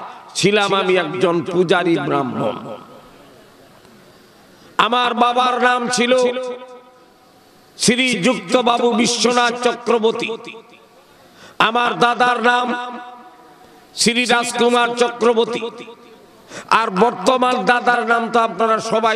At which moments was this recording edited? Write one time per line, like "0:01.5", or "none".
none